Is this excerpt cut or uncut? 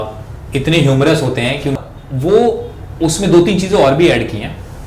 cut